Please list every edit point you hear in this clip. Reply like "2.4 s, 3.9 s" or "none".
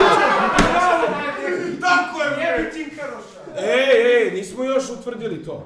none